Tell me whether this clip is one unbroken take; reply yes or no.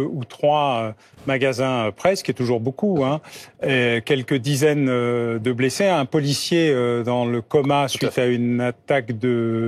yes